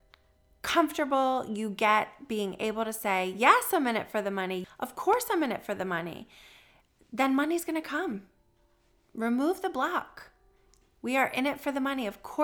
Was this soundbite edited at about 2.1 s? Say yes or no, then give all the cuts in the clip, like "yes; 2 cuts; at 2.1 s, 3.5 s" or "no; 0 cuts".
no; 1 cut; at 4.6 s